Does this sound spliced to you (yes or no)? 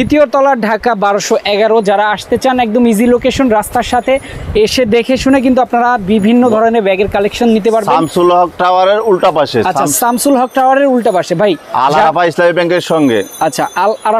no